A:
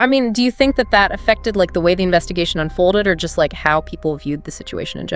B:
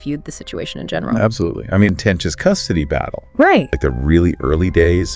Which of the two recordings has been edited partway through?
B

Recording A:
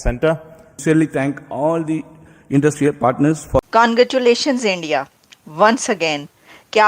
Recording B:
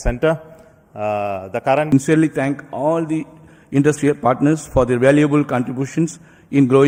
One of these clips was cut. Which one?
A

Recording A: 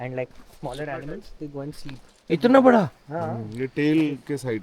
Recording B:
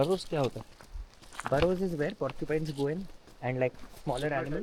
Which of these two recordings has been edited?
A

